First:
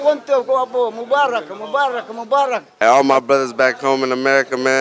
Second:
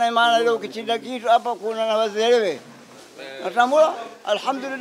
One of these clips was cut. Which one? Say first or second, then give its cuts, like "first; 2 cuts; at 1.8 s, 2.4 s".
first; 1 cut; at 2.7 s